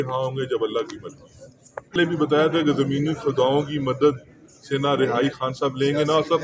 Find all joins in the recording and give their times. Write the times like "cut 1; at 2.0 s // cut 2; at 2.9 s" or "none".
none